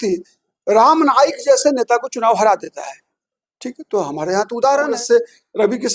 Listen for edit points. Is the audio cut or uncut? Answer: cut